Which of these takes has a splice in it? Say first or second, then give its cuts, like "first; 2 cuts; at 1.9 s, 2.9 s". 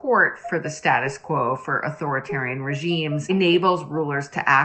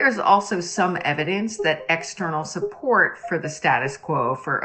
first; 1 cut; at 3.3 s